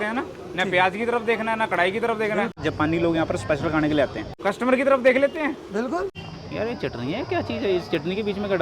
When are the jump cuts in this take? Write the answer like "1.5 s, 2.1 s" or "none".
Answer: 2.5 s, 4.3 s, 6.1 s